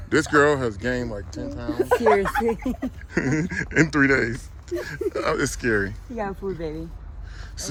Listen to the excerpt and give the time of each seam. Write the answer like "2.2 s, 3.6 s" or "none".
none

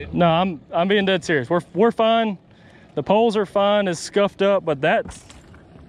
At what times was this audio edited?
none

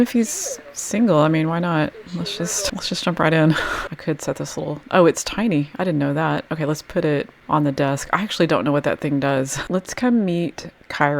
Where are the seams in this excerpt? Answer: 3.8 s, 9.6 s

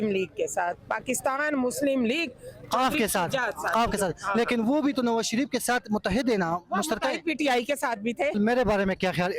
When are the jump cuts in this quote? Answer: 8.4 s

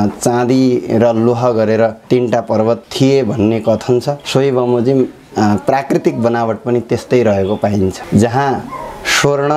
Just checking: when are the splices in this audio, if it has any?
none

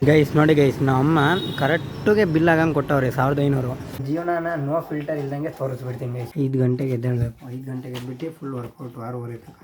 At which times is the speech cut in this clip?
4.0 s, 6.2 s

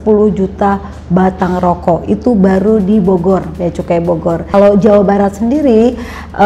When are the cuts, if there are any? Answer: 4.5 s

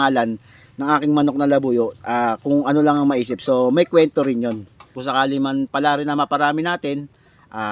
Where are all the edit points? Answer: 4.9 s

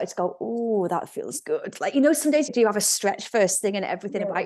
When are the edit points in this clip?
2.5 s

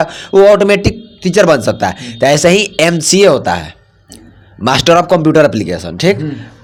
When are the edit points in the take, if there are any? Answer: none

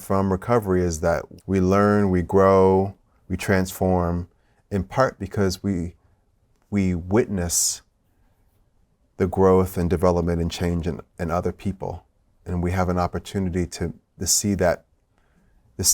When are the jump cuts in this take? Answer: 1.3 s

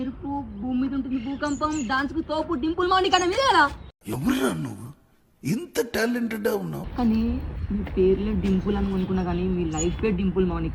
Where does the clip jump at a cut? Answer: 3.8 s, 6.8 s

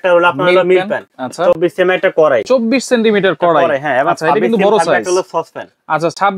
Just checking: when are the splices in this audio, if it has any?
none

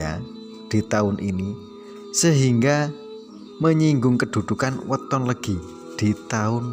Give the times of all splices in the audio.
none

